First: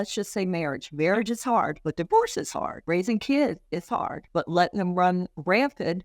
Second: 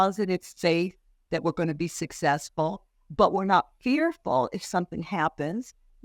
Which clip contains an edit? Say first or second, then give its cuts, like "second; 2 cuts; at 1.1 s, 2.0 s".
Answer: first; 3 cuts; at 1.8 s, 2.8 s, 4.2 s